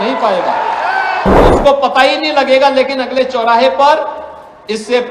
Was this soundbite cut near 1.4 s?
yes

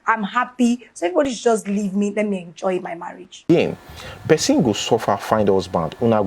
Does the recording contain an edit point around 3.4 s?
yes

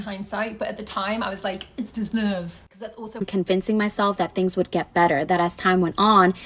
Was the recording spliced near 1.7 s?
no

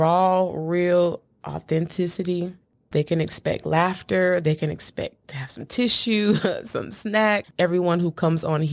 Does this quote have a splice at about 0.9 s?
no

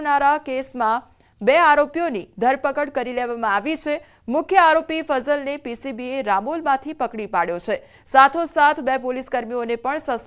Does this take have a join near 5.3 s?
no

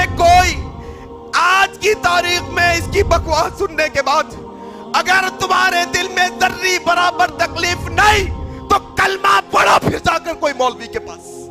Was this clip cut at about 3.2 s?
no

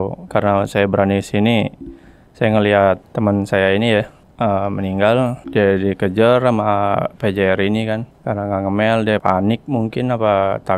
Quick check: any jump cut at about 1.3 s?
no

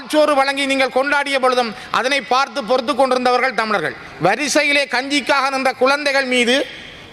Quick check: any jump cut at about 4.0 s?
yes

